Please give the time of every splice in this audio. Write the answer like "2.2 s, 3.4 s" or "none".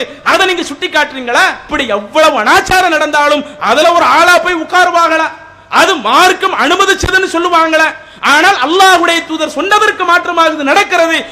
1.6 s